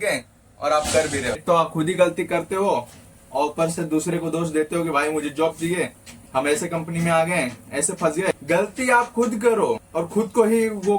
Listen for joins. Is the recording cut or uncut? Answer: cut